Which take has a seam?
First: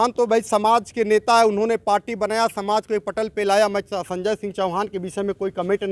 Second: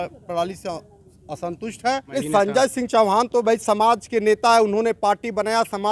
second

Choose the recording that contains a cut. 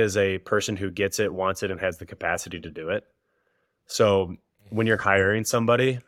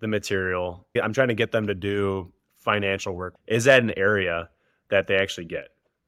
second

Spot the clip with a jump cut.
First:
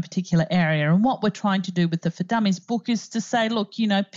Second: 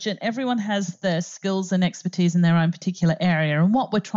first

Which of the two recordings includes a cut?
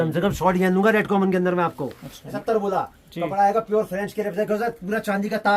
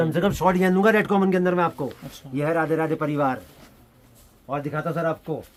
first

